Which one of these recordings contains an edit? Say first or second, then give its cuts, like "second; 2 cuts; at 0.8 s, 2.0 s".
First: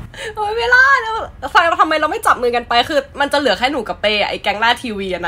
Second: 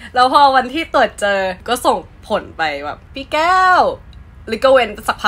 second; 2 cuts; at 1.6 s, 3.1 s